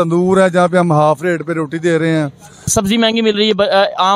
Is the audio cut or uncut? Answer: cut